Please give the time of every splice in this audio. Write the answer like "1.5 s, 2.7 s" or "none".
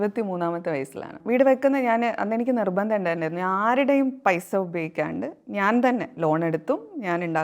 1.2 s